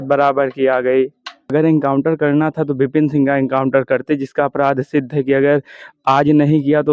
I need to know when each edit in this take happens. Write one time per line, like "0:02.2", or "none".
0:01.4